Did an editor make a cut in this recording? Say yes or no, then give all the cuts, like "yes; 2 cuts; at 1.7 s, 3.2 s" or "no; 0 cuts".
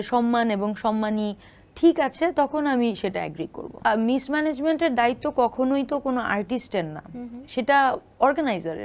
yes; 1 cut; at 3.9 s